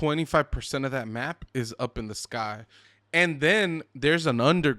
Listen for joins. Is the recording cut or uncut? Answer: cut